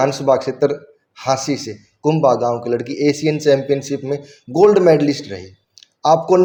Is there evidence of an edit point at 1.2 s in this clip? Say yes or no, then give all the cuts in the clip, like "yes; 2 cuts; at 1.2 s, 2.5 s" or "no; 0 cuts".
no; 0 cuts